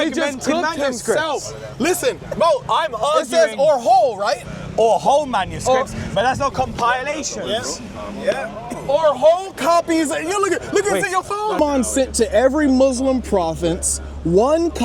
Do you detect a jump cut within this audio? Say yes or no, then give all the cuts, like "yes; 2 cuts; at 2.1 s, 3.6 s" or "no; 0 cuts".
yes; 1 cut; at 11.6 s